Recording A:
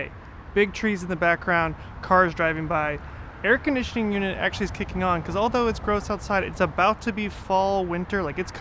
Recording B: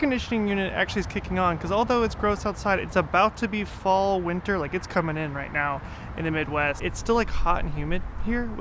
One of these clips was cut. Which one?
B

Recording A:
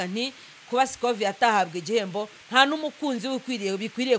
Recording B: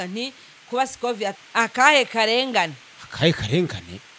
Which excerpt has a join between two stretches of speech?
B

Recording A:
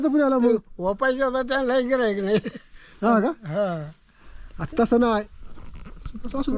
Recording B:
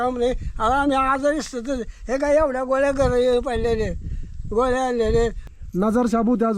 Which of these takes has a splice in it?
B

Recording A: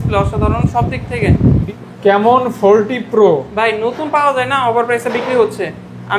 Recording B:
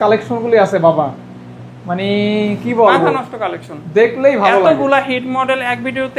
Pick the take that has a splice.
A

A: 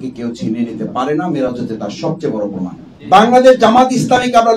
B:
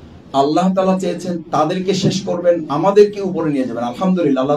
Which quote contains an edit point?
A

